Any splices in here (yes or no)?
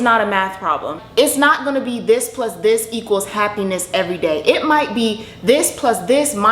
yes